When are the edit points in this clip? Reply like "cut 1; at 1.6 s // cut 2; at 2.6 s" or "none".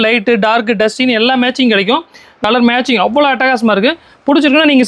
cut 1; at 2.4 s